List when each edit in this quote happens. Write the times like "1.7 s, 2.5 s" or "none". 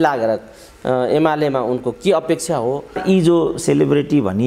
2.9 s